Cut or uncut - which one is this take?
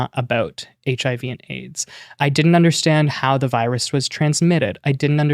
cut